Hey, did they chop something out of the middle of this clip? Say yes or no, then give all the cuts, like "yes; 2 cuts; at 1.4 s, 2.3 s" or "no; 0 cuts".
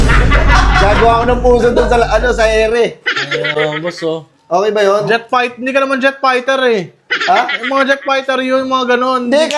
no; 0 cuts